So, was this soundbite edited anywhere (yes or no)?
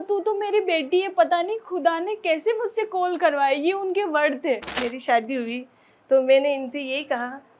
yes